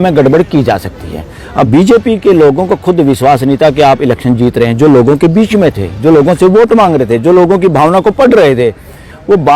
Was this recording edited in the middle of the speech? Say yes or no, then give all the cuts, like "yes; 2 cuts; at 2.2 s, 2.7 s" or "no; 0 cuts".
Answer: yes; 1 cut; at 1.7 s